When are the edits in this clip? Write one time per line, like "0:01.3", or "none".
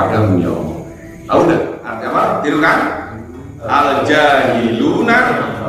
0:01.9